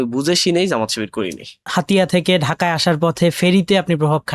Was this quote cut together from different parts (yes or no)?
yes